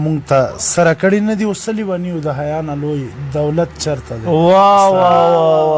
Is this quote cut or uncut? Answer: uncut